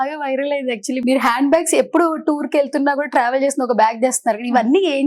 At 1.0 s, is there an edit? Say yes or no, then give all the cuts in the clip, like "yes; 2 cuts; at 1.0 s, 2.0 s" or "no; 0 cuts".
yes; 1 cut; at 1.0 s